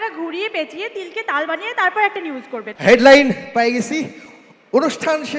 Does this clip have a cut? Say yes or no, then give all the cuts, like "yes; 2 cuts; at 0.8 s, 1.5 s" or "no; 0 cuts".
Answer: yes; 1 cut; at 2.7 s